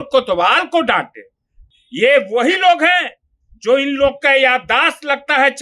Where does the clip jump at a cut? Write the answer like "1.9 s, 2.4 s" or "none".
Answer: 1.7 s